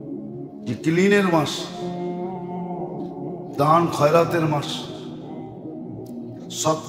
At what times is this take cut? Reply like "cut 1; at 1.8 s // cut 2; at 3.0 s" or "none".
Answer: cut 1; at 0.8 s // cut 2; at 1.8 s // cut 3; at 3.6 s